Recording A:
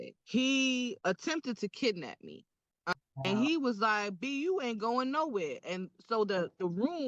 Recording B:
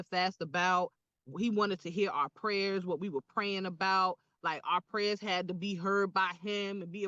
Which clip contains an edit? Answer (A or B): A